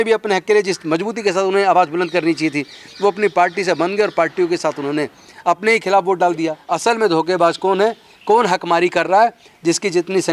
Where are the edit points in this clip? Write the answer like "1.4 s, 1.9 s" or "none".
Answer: 6.6 s